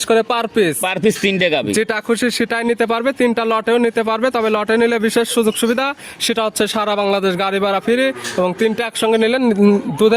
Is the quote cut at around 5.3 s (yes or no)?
no